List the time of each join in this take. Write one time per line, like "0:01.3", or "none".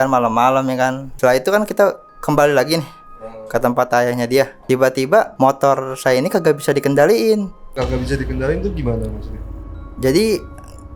0:01.1
0:04.6
0:05.3
0:07.6